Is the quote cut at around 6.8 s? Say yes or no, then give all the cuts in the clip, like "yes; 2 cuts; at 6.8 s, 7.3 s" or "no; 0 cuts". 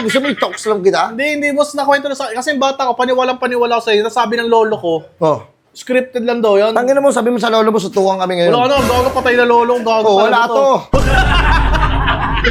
no; 0 cuts